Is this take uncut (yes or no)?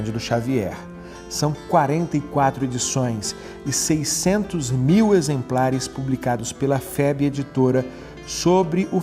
no